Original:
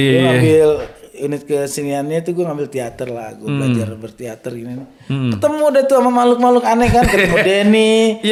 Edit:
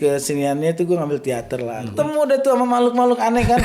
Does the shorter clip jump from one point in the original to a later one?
yes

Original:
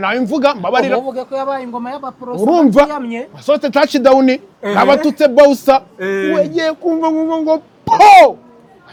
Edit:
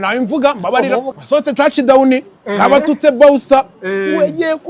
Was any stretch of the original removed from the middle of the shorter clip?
yes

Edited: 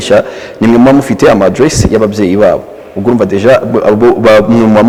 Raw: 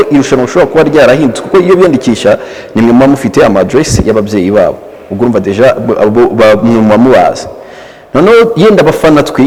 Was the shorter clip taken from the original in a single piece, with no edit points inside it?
yes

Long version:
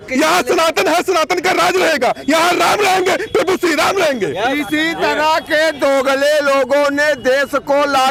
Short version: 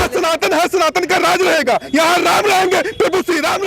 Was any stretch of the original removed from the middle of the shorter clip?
no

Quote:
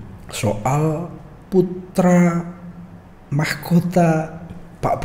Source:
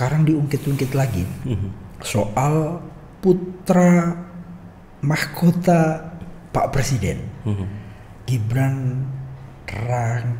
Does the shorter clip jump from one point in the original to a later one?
no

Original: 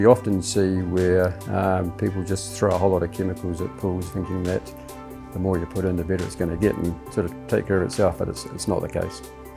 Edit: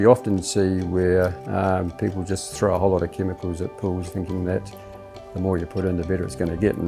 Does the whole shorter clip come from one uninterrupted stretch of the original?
yes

